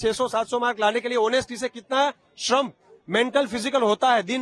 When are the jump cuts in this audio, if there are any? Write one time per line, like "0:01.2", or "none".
none